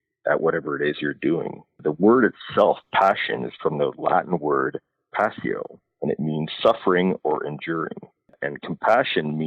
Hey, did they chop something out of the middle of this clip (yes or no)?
yes